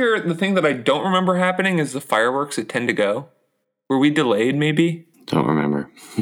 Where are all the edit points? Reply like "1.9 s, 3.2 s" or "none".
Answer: 5.1 s